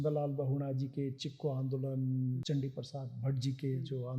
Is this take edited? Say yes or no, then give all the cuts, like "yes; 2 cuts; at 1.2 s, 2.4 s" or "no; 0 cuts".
yes; 1 cut; at 2.4 s